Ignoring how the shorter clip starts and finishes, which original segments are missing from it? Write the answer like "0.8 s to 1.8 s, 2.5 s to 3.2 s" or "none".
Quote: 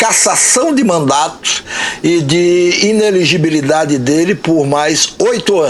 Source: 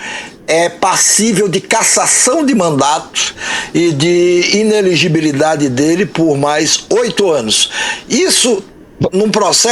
none